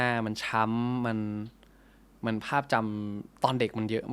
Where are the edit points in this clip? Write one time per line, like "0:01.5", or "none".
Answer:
none